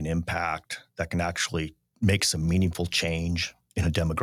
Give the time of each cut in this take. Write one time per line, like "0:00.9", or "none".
0:01.8